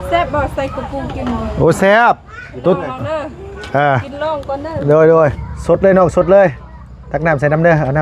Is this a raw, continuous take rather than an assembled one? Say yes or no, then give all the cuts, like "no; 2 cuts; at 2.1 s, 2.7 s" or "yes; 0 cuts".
no; 1 cut; at 5.5 s